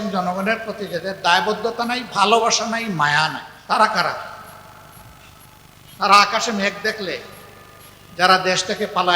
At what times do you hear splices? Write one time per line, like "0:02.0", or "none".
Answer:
0:03.5